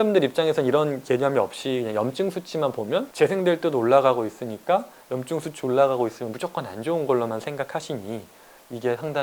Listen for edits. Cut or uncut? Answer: cut